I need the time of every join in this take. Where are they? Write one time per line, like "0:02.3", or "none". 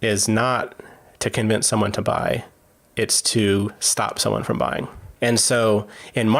none